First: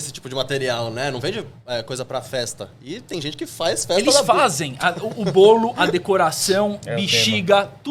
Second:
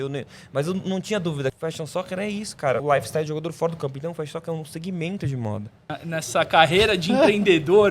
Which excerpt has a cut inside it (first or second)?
second